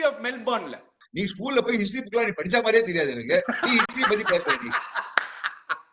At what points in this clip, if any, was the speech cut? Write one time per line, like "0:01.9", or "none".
0:01.0